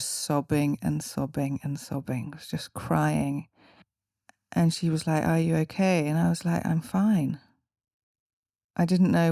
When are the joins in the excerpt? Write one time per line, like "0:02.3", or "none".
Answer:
0:03.7